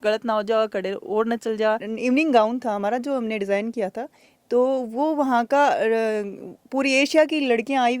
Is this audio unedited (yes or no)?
no